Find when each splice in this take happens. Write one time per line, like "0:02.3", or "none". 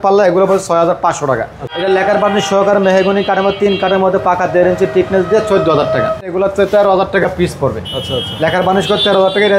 0:01.7
0:06.3